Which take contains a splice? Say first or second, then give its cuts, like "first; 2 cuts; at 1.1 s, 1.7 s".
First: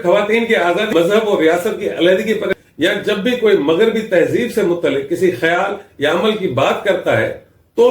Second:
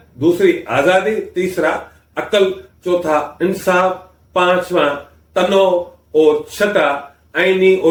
first; 2 cuts; at 0.9 s, 2.5 s